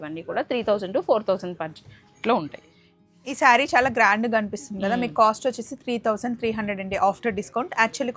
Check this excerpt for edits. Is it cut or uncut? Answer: cut